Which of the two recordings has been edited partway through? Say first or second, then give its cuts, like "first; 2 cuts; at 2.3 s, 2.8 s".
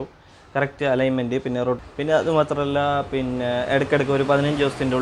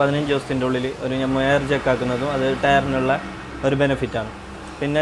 first; 1 cut; at 1.8 s